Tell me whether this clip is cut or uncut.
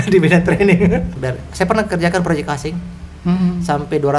cut